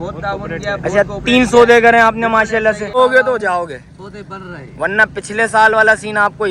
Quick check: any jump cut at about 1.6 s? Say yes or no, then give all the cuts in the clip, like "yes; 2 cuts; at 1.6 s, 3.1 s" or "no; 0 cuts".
no; 1 cut; at 3.0 s